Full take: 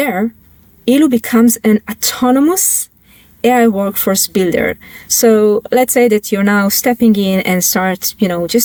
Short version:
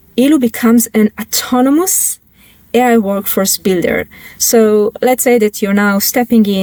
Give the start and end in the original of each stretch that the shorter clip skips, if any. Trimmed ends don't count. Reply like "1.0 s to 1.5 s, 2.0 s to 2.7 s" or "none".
none